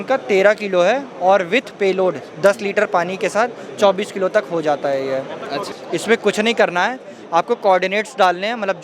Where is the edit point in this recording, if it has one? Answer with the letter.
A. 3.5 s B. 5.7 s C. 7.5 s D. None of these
B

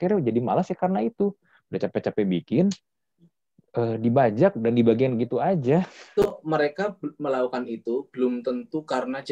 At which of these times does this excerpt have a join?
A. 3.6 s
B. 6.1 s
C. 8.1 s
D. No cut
B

